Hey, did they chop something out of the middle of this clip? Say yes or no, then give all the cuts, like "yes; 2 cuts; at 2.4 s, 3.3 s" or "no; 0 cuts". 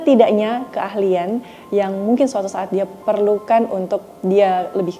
no; 0 cuts